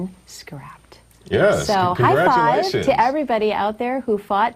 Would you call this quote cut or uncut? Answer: cut